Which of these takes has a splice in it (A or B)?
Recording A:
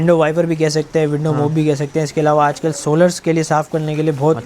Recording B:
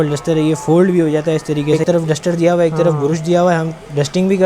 B